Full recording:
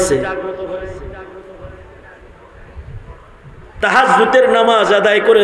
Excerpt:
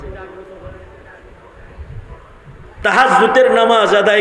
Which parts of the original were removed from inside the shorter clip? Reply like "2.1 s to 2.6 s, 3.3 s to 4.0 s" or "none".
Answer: none